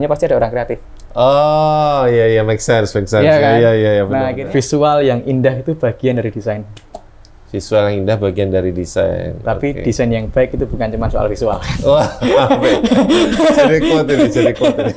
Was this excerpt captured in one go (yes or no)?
no